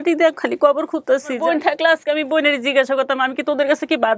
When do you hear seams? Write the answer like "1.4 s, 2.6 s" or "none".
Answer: 1.3 s